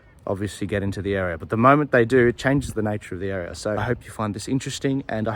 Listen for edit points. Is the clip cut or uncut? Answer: cut